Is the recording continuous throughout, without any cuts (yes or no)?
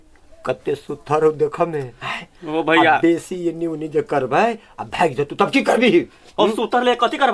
yes